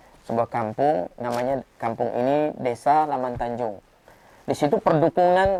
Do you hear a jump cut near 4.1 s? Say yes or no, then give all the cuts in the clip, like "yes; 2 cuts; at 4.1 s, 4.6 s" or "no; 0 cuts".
no; 0 cuts